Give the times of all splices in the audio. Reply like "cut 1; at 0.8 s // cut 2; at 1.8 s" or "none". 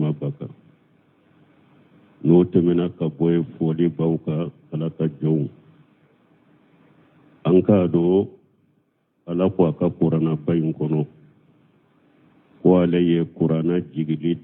cut 1; at 12.9 s